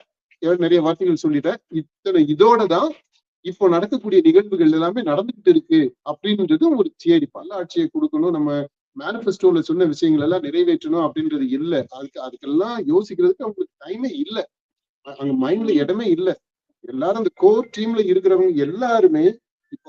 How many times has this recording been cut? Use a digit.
1